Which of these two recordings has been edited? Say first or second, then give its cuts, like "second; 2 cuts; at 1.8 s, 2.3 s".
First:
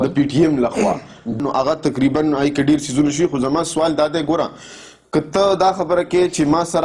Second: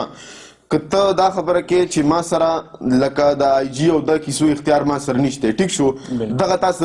first; 1 cut; at 1.4 s